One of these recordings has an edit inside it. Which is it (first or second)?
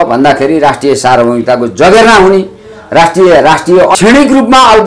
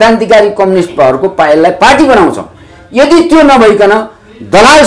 first